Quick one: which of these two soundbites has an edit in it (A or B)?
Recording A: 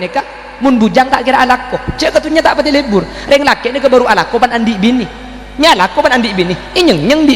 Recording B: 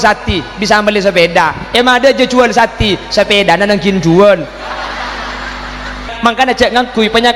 B